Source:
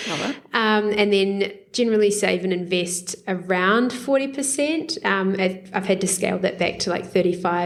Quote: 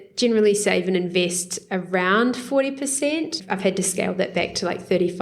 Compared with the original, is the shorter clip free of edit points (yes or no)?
no